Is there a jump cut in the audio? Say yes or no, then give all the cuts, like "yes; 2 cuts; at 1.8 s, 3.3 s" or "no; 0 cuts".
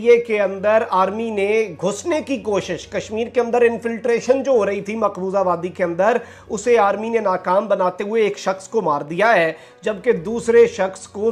no; 0 cuts